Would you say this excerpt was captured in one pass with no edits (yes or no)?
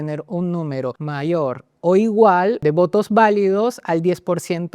no